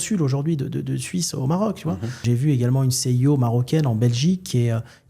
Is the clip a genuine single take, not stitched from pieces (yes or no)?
no